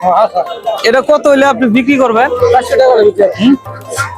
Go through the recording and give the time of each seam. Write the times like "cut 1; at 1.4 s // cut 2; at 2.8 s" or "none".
none